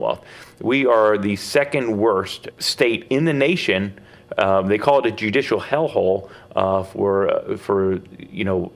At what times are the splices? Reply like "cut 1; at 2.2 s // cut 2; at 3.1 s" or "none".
cut 1; at 2.4 s